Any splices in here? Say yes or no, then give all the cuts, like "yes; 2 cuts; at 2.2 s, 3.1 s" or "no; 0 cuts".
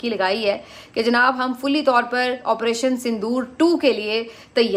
no; 0 cuts